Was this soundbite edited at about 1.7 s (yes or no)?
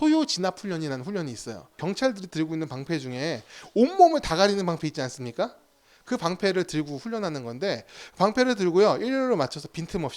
yes